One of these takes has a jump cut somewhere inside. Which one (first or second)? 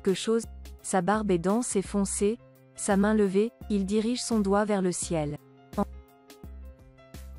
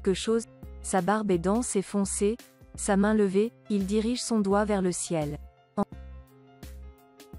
first